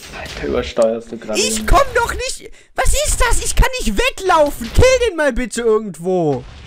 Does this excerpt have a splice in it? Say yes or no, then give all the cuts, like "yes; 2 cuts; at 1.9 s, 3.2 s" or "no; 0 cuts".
no; 0 cuts